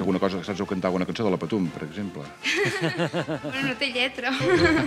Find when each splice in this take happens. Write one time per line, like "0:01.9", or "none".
none